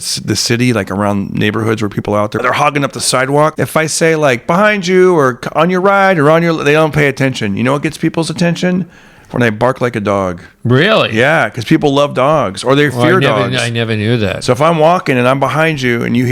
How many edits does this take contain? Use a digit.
2